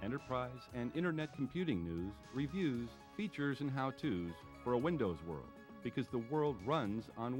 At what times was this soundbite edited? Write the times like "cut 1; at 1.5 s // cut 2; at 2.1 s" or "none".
none